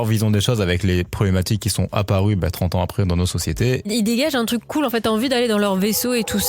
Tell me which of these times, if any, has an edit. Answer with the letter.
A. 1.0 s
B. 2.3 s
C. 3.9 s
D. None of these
C